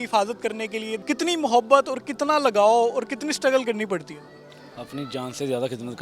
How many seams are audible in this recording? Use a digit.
1